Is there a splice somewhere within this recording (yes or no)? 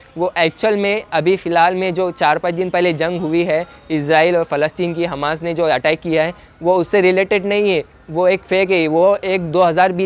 no